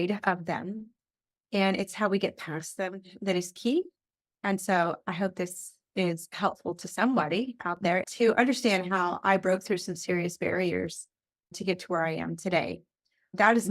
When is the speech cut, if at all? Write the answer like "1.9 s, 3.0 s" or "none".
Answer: 8.0 s

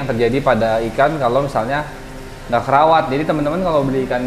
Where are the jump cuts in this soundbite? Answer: none

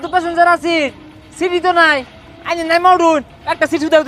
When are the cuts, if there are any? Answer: none

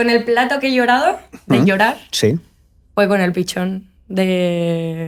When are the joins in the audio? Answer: none

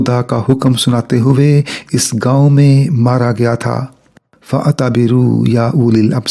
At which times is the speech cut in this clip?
none

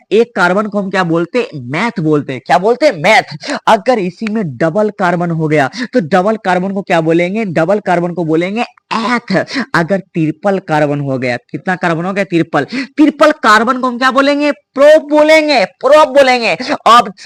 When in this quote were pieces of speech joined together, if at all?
none

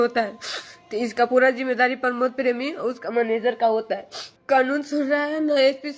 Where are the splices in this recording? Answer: 4.3 s

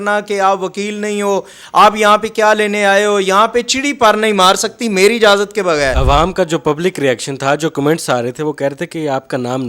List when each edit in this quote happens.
6.0 s

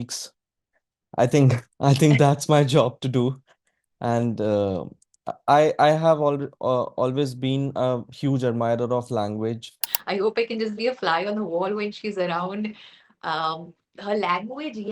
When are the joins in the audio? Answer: 9.9 s

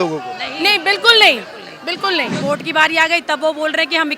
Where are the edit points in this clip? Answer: 2.4 s

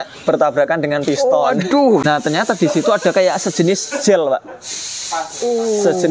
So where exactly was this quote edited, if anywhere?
2.0 s

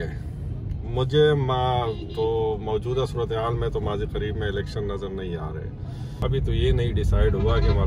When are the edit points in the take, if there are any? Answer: 6.2 s

